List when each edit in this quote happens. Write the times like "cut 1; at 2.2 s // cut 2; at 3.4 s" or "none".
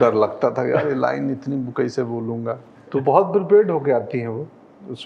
cut 1; at 2.7 s